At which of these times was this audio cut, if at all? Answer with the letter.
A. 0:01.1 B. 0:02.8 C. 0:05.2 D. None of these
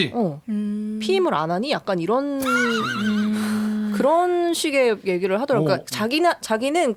D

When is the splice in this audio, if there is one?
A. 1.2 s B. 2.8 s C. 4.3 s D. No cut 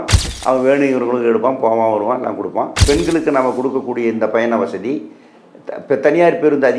B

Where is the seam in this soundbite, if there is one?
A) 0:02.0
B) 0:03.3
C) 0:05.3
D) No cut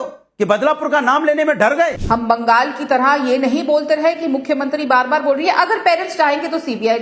A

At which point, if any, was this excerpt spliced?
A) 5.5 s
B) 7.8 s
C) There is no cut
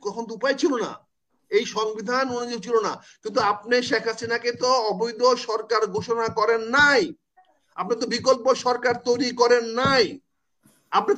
C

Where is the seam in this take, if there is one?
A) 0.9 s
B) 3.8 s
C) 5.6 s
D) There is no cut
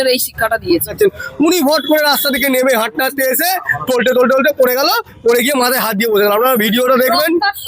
A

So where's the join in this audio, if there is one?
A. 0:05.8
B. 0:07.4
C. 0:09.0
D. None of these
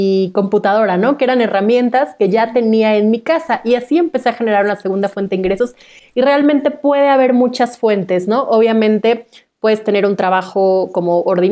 D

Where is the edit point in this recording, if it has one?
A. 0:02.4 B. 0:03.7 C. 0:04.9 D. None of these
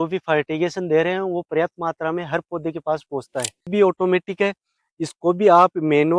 B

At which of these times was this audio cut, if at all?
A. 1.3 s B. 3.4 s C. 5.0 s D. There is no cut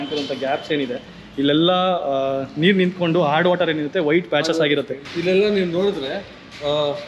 C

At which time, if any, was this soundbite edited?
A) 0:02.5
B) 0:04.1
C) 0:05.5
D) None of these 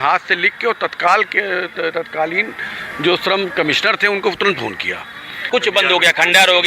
C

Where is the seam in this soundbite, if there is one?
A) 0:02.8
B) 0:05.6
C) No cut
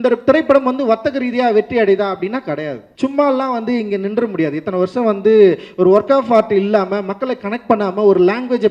A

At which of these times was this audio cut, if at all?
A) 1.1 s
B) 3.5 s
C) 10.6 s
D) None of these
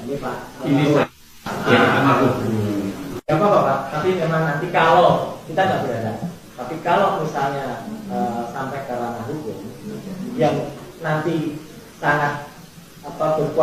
D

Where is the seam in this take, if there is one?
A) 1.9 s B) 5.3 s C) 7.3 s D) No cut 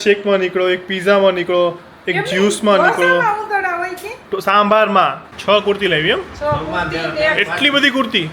B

